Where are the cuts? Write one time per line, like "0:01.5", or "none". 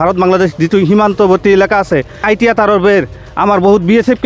0:02.1